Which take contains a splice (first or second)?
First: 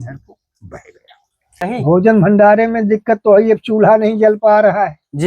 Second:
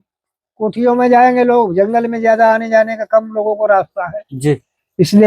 first